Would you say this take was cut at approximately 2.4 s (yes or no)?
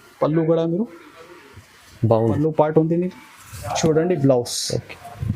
yes